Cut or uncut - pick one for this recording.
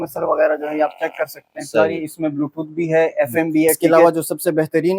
cut